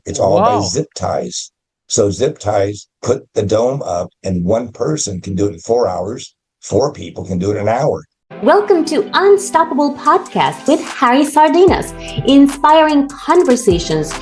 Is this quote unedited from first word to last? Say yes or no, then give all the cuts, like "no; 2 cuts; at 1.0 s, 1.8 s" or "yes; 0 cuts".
no; 1 cut; at 8.2 s